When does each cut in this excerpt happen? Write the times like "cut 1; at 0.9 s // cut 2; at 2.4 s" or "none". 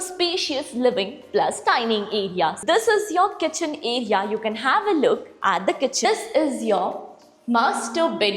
cut 1; at 2.6 s // cut 2; at 6.0 s